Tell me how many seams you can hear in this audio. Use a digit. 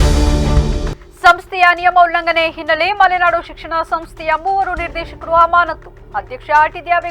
1